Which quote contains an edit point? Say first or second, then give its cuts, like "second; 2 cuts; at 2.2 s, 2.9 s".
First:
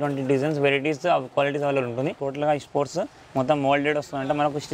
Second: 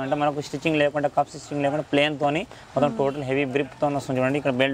first; 1 cut; at 2.2 s